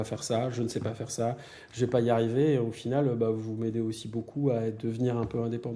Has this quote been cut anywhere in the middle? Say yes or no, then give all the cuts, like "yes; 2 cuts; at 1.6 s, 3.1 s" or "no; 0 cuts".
no; 0 cuts